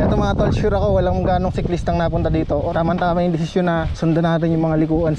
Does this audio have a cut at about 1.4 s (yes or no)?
no